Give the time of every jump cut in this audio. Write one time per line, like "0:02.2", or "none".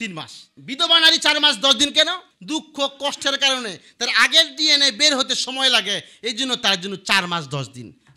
0:02.3

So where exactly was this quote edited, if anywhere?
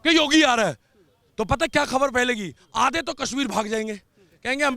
none

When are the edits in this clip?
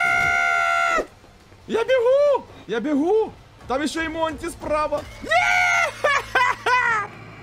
none

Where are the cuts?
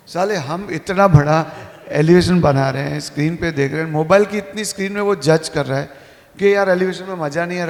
none

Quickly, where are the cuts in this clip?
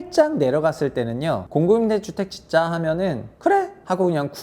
0:01.4
0:03.5

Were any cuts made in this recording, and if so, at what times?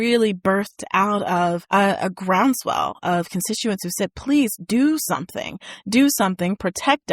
0:01.6

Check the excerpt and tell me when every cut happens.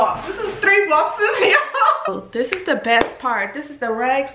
0:02.1

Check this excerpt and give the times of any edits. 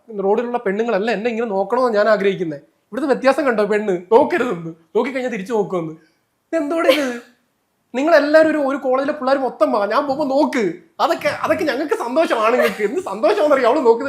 none

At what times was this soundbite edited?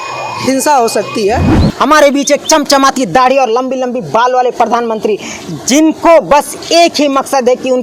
0:01.6

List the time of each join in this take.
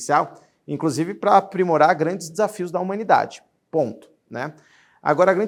none

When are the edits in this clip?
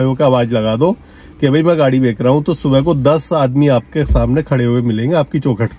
none

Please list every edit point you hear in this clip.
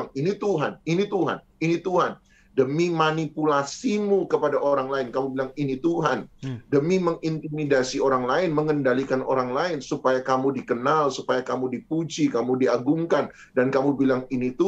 none

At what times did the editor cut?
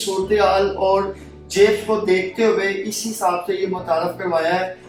none

